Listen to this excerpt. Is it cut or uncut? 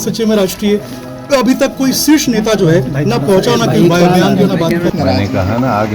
cut